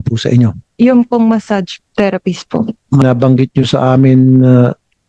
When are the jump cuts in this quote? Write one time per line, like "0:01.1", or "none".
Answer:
0:03.0